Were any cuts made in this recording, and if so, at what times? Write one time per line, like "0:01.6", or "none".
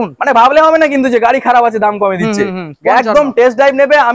none